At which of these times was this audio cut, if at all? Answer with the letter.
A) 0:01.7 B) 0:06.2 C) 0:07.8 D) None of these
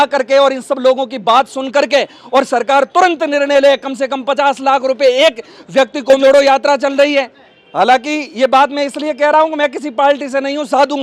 B